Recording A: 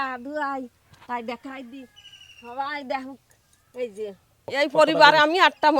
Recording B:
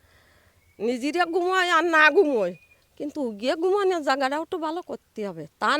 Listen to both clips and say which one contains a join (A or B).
A